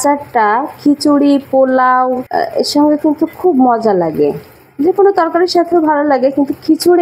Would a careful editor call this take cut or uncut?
cut